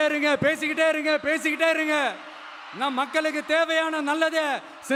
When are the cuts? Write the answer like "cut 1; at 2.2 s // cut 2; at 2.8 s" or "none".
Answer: none